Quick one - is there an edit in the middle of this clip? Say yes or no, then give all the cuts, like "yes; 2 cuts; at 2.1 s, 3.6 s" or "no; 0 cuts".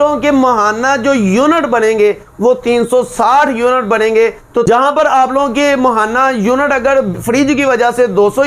yes; 1 cut; at 4.6 s